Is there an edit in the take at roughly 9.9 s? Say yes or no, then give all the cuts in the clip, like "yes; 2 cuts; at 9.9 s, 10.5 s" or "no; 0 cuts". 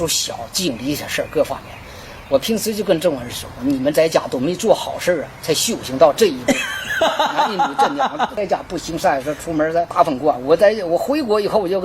yes; 2 cuts; at 8.3 s, 9.9 s